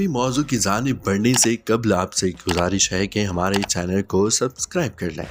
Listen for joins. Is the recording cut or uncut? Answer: uncut